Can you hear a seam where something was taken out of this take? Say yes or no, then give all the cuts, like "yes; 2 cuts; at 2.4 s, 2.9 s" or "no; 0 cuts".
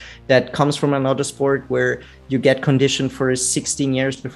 no; 0 cuts